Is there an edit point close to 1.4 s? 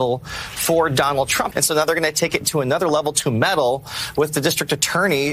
yes; 1 cut; at 1.4 s

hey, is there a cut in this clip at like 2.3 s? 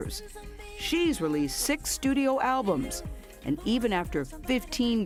no; 0 cuts

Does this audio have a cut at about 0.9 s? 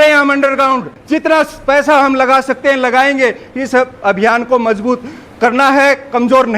yes; 1 cut; at 0.9 s

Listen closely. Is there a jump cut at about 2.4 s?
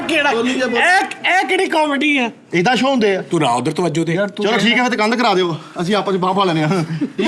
yes; 1 cut; at 2.4 s

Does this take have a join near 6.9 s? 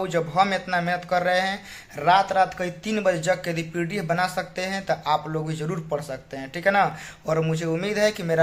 no; 0 cuts

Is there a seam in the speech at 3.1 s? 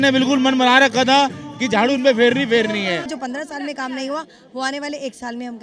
yes; 1 cut; at 3.1 s

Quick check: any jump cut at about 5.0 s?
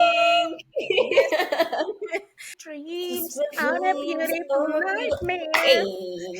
no; 1 cut; at 2.6 s

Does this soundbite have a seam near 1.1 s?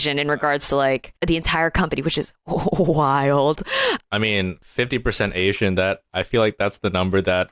yes; 2 cuts; at 1.1 s, 4.2 s

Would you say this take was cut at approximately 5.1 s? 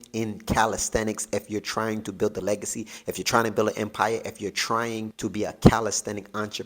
yes; 1 cut; at 5.1 s

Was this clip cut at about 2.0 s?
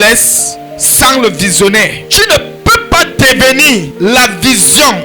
yes; 2 cuts; at 2.0 s, 3.9 s

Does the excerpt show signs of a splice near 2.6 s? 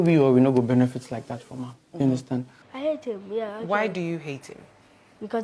yes; 1 cut; at 2.6 s

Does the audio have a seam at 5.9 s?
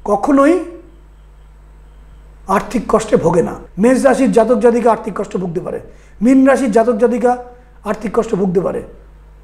no; 1 cut; at 3.6 s

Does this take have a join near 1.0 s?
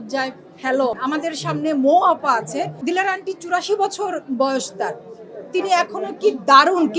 yes; 2 cuts; at 1.0 s, 2.8 s

